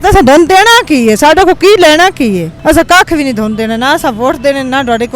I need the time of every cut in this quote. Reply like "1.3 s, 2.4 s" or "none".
2.5 s